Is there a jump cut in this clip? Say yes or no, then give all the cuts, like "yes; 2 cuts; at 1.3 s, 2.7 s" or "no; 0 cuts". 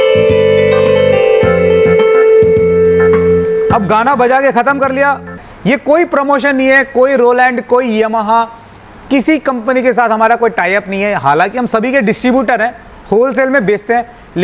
yes; 1 cut; at 5.5 s